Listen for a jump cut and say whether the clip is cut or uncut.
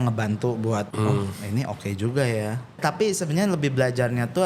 cut